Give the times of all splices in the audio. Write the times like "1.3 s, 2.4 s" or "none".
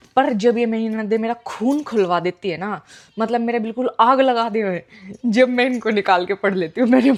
none